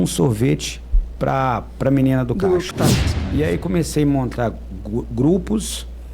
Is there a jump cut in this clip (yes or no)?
yes